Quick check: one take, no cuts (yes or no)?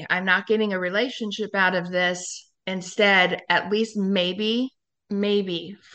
yes